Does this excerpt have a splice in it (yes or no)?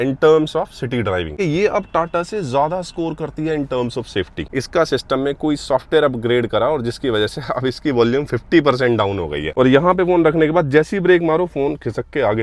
yes